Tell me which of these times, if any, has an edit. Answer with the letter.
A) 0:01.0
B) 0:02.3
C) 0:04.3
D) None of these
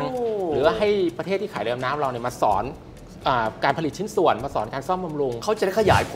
B